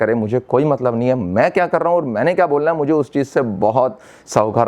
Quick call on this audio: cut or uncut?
uncut